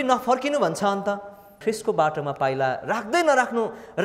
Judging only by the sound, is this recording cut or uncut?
cut